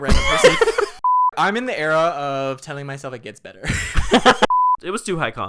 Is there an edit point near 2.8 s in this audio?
no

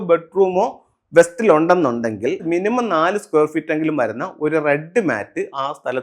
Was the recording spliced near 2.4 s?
yes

